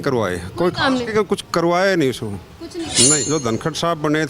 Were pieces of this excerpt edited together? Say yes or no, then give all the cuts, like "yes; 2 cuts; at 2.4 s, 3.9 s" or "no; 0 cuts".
yes; 1 cut; at 2.9 s